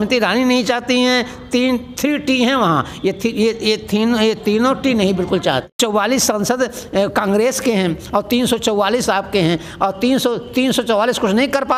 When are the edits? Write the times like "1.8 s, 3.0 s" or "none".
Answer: 5.6 s